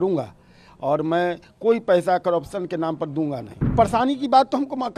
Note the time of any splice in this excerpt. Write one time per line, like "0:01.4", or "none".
0:03.6